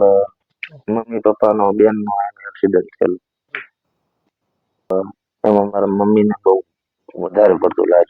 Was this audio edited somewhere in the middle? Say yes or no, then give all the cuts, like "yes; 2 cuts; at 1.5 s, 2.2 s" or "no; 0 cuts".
yes; 1 cut; at 4.9 s